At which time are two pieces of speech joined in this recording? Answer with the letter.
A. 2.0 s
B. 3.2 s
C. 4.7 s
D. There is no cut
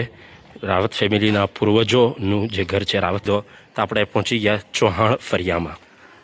B